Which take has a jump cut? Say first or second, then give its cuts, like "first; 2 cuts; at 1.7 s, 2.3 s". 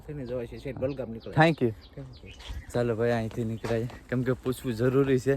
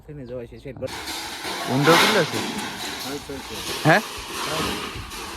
second; 1 cut; at 0.9 s